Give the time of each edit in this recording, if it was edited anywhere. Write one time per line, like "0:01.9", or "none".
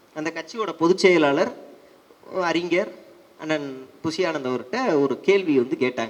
none